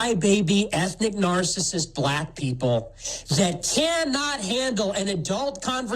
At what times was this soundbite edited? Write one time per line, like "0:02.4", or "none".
0:03.7